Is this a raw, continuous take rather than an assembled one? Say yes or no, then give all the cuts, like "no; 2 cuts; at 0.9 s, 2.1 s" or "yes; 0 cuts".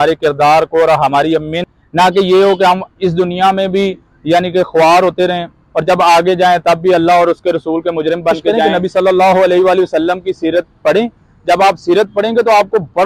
no; 2 cuts; at 1.7 s, 8.5 s